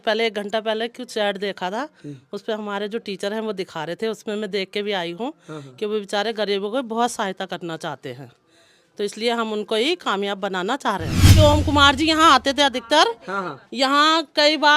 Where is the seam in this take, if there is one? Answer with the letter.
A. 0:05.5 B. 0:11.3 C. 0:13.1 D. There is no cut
B